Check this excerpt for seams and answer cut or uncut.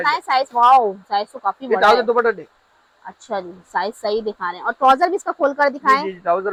uncut